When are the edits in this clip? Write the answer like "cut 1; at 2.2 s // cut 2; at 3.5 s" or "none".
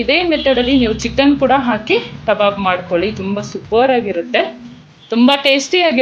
none

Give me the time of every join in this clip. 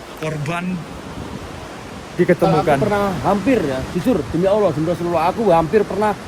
cut 1; at 2.8 s

